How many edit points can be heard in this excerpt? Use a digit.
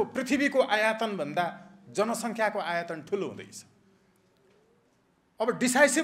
0